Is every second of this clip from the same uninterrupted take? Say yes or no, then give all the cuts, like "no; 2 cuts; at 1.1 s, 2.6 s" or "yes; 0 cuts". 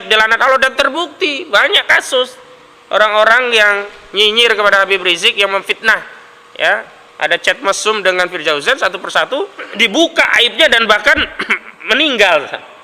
no; 1 cut; at 9.7 s